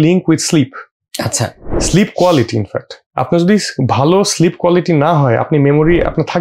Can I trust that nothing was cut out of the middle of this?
yes; 0 cuts

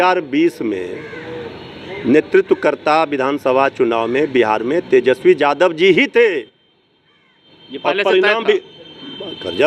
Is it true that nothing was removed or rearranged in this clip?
yes; 0 cuts

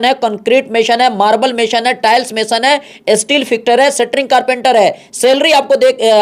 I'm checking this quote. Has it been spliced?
no; 0 cuts

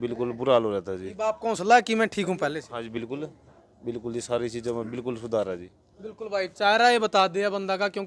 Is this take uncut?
yes; 0 cuts

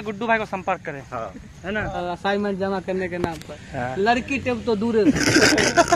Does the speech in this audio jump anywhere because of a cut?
yes; 2 cuts; at 2.0 s, 5.1 s

